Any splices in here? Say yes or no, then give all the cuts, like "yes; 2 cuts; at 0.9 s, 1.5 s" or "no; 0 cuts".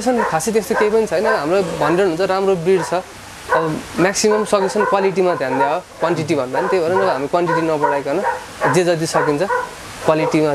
no; 0 cuts